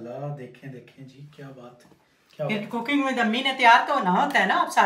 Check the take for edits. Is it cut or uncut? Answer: uncut